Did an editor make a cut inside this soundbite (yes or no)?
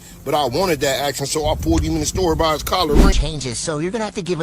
yes